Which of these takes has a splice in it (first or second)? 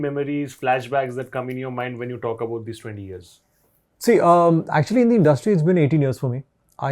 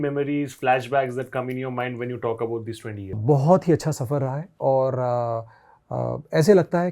second